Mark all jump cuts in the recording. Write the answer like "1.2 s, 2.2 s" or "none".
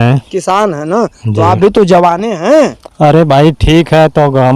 none